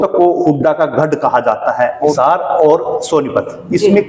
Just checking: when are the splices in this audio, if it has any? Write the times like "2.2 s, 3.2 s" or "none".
2.2 s